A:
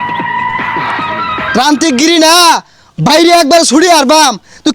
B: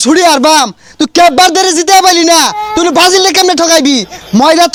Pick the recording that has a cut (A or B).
A